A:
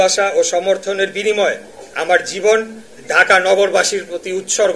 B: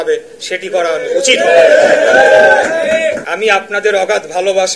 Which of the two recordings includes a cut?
B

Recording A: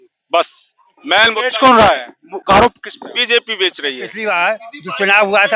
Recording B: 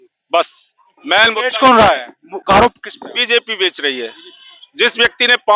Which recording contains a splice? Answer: A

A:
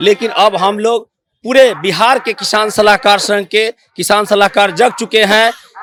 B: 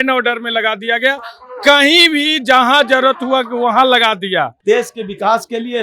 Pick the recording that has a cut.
B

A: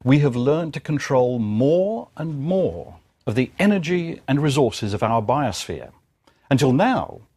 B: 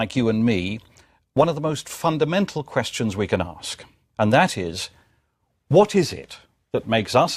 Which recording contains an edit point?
A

